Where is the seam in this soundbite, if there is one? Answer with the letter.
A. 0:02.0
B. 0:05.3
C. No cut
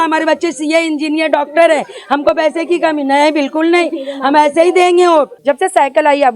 B